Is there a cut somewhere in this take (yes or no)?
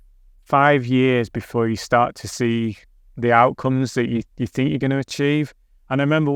no